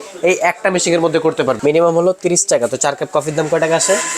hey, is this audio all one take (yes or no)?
no